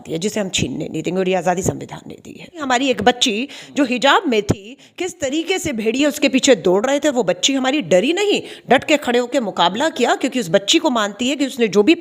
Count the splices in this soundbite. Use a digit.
1